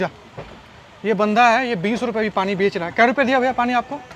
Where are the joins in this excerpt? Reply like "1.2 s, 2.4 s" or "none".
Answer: none